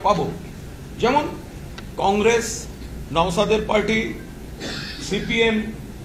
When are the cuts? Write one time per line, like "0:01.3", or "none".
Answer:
none